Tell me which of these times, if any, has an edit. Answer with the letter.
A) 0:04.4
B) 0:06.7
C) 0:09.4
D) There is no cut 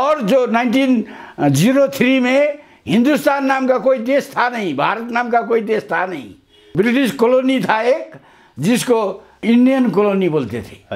C